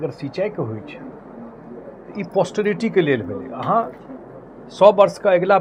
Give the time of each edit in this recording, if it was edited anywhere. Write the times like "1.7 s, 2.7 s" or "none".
none